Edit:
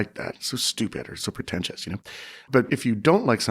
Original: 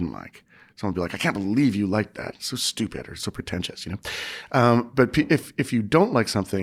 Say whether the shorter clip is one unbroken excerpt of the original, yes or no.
no